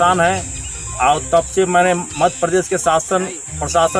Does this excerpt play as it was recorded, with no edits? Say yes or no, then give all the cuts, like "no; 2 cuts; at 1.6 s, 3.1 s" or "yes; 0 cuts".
yes; 0 cuts